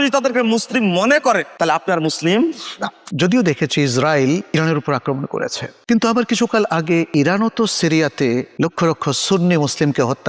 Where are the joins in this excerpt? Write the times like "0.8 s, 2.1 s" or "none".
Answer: 1.5 s, 3.0 s, 4.5 s, 7.1 s, 8.5 s